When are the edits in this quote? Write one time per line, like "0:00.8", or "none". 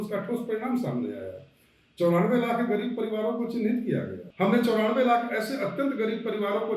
0:04.2